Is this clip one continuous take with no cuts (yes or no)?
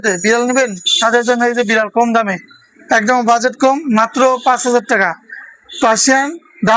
yes